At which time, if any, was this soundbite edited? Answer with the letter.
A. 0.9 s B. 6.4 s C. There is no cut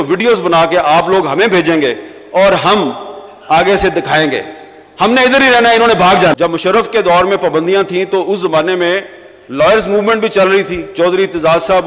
B